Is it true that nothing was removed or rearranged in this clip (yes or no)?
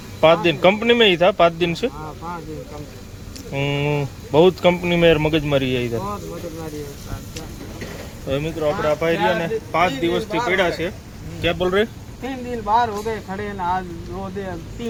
yes